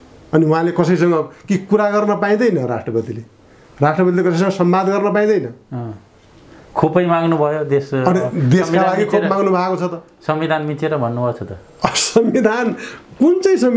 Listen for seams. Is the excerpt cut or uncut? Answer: uncut